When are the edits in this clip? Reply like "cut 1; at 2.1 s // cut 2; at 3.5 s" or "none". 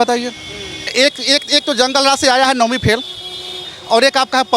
cut 1; at 0.9 s